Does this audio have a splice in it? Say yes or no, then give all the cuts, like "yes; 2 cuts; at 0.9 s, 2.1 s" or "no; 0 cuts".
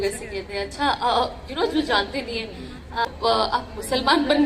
yes; 1 cut; at 3.1 s